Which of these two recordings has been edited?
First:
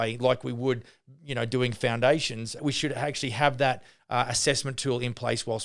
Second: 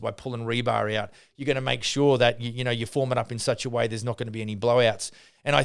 first; 1 cut; at 2.6 s

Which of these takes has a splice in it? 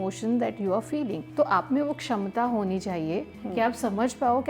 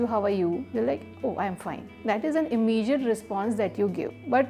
first; 1 cut; at 1.2 s

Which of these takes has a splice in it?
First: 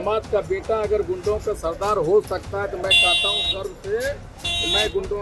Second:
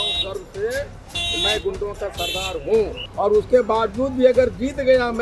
second; 1 cut; at 3.0 s

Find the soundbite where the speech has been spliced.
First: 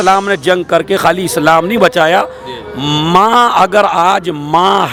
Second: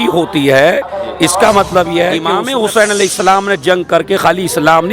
second; 1 cut; at 2.3 s

